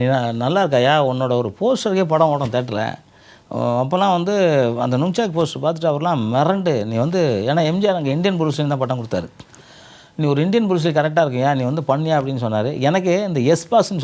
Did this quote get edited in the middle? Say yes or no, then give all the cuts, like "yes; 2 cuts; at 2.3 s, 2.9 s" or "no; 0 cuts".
no; 0 cuts